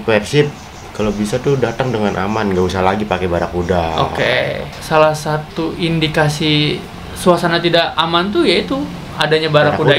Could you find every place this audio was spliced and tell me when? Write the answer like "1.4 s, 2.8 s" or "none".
4.7 s